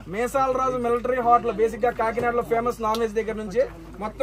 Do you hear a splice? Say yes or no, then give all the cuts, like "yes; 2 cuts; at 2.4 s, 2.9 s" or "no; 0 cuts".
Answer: no; 0 cuts